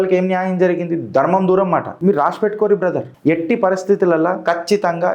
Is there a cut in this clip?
yes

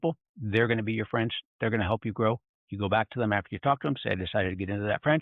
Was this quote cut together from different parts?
no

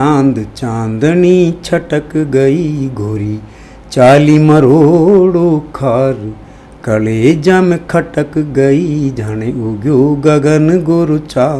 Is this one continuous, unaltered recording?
yes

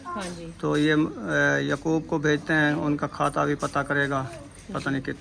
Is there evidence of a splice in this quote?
no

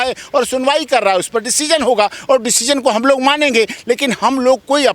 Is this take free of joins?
yes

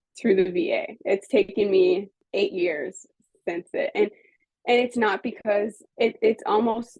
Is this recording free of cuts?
no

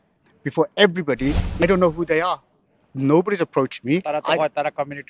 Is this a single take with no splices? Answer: no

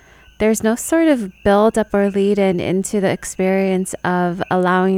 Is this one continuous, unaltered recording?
yes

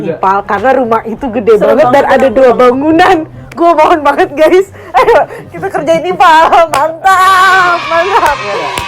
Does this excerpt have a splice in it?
no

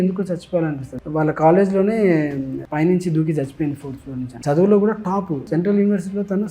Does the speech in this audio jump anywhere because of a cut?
yes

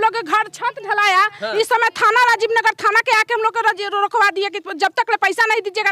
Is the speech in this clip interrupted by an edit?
no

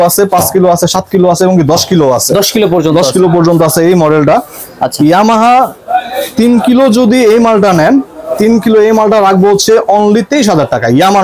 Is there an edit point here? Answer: no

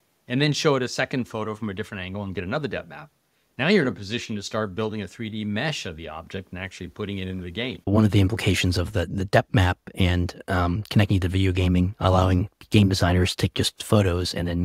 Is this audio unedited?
no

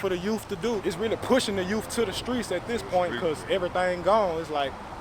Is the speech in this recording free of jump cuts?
yes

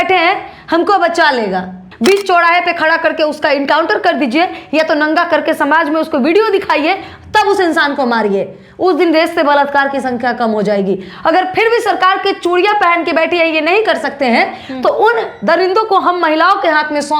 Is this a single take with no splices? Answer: no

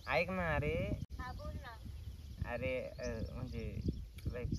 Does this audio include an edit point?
yes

